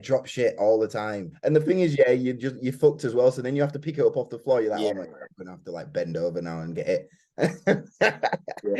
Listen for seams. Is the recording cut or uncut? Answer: cut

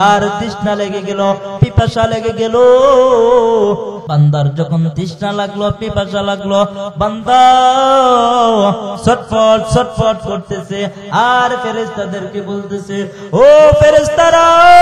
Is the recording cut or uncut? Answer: cut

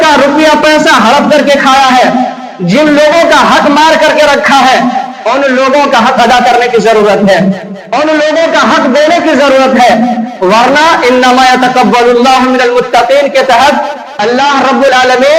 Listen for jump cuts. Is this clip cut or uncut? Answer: uncut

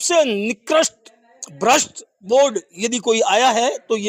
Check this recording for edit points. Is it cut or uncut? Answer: uncut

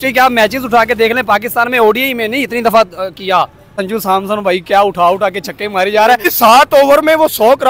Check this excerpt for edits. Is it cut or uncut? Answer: cut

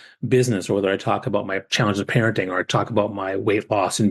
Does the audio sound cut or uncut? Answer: cut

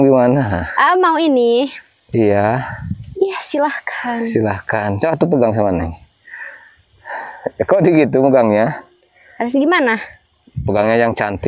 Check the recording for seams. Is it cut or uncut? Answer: uncut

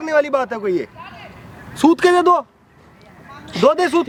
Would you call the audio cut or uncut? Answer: uncut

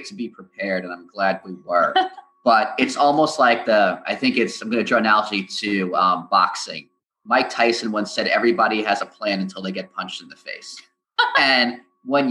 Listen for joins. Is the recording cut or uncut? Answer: uncut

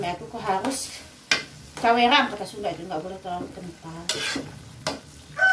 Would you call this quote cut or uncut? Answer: uncut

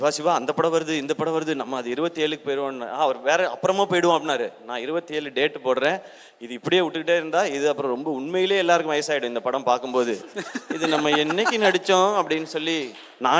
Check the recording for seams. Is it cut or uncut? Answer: uncut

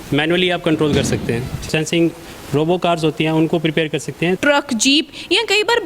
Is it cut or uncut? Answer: cut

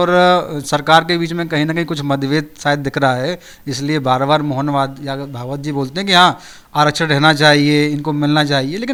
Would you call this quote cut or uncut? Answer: uncut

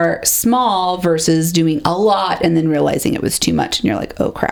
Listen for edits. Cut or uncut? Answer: uncut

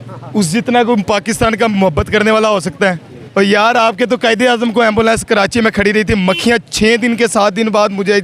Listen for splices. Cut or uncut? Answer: cut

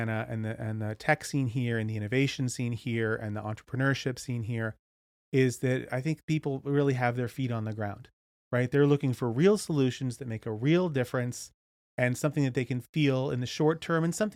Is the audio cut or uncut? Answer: uncut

